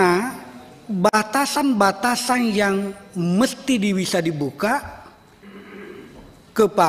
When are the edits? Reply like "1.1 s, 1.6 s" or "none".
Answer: none